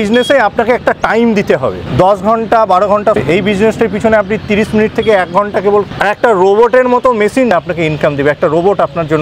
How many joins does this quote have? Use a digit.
4